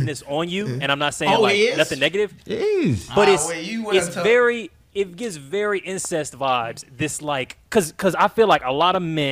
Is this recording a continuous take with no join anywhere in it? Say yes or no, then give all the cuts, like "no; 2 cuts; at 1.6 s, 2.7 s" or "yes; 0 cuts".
yes; 0 cuts